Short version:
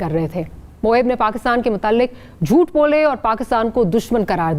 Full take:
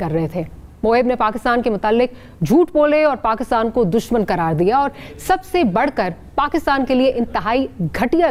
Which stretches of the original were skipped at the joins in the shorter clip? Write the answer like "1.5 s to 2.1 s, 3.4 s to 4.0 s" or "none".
none